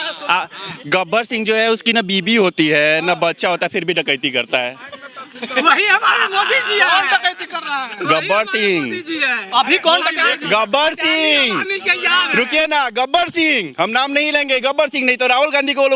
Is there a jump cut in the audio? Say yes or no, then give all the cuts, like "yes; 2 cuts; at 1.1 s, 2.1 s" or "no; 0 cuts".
no; 0 cuts